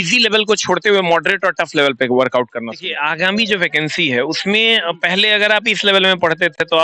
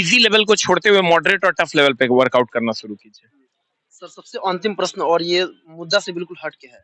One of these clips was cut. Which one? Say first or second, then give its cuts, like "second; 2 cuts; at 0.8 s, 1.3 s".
first; 1 cut; at 2.8 s